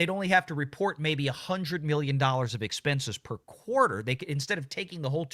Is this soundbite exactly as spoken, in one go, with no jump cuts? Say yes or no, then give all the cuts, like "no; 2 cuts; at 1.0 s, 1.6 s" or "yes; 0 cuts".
yes; 0 cuts